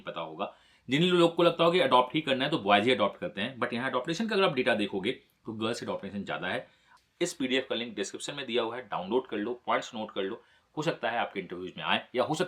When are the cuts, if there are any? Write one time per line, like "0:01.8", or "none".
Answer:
0:06.9